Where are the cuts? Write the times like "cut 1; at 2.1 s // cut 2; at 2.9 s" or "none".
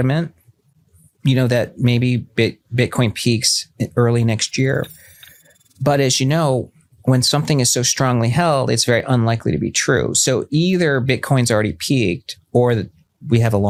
none

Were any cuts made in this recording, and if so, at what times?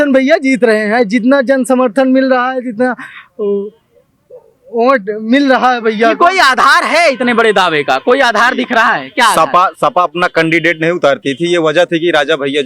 none

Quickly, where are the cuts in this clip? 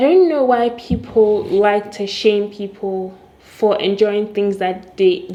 none

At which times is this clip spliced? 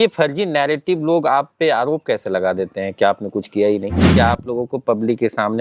cut 1; at 4.1 s

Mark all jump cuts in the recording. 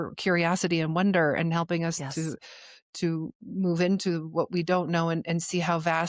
none

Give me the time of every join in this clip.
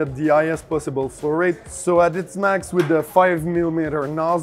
cut 1; at 1.7 s

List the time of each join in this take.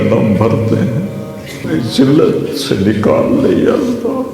cut 1; at 1.6 s

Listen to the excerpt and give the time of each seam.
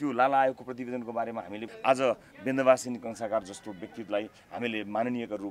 cut 1; at 1.7 s

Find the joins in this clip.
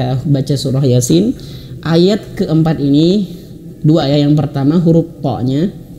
none

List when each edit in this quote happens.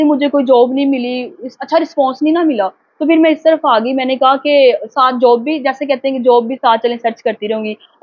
none

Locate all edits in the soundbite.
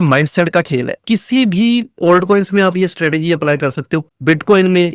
cut 1; at 1.0 s // cut 2; at 4.1 s

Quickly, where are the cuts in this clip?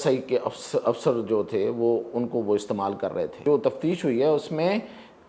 cut 1; at 3.4 s

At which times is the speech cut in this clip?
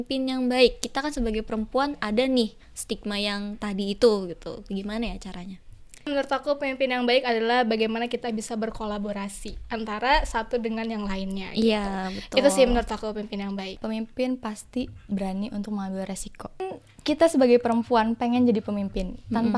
cut 1; at 6.1 s // cut 2; at 13.8 s // cut 3; at 16.7 s

